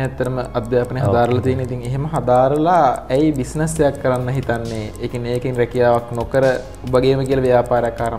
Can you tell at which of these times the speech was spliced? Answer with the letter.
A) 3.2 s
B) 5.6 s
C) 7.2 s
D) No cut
D